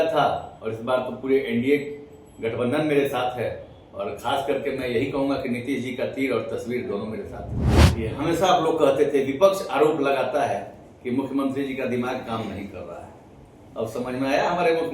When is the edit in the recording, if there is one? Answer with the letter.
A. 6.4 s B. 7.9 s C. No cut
B